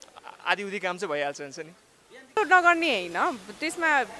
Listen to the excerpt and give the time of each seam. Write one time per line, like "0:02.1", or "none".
0:02.4